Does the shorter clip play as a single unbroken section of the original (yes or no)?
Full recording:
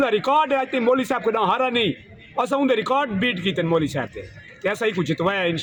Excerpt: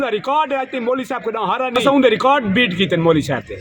no